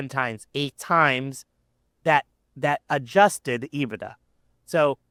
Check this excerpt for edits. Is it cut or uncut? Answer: uncut